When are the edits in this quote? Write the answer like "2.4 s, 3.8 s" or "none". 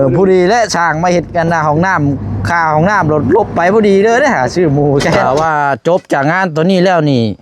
5.2 s